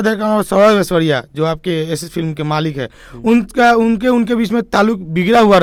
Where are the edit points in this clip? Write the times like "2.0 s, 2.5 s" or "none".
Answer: none